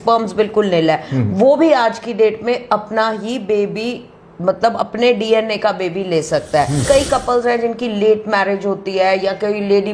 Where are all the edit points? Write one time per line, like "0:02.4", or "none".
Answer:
0:06.8